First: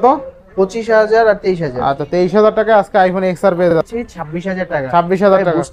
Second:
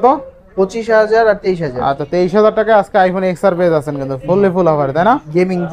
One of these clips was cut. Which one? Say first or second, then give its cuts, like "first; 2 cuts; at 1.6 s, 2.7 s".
first; 1 cut; at 3.7 s